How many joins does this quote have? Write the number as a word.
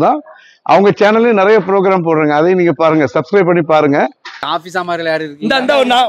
one